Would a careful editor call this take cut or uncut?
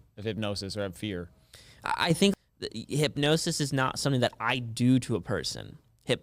cut